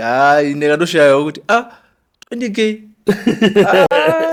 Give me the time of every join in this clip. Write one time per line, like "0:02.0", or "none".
none